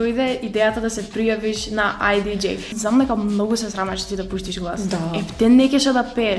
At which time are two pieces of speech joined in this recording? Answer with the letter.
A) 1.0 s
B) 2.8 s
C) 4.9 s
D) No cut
B